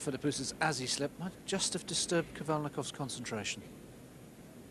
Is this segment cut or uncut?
uncut